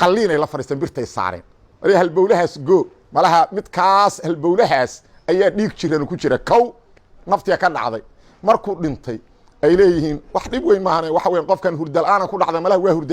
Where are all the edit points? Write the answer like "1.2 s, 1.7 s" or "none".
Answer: 3.0 s